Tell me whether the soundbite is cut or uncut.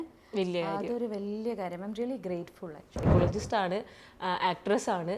cut